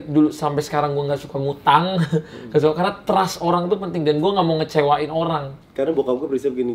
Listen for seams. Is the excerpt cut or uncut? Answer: cut